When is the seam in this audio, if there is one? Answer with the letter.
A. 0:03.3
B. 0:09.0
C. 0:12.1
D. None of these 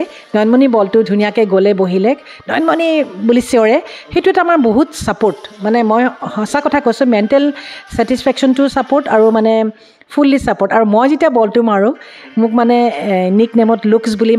D